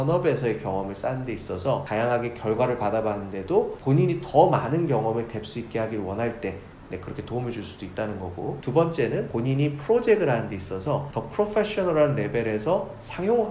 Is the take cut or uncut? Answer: cut